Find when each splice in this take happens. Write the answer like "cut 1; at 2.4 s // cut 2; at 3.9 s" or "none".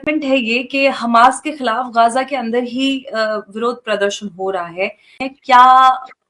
cut 1; at 5.2 s